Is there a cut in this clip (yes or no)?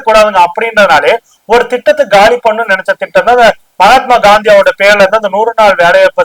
yes